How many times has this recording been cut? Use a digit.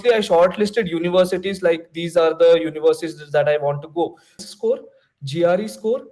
1